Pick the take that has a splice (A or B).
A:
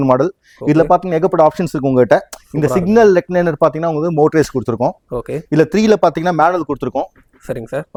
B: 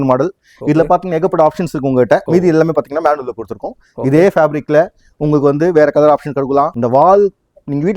B